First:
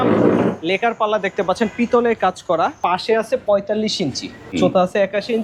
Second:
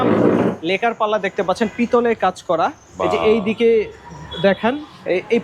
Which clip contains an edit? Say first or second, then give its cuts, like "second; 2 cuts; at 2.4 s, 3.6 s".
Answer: first; 2 cuts; at 2.8 s, 4.5 s